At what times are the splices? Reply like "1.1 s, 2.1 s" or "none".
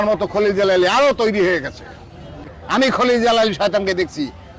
2.6 s